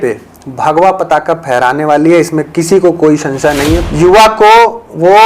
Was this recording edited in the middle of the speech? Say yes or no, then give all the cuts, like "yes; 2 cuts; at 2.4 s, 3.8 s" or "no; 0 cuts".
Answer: yes; 1 cut; at 3.8 s